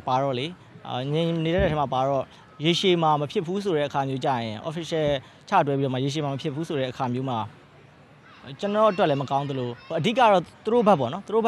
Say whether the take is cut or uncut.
uncut